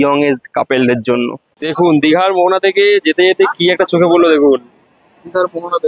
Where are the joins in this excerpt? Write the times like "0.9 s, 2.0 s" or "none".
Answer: 1.6 s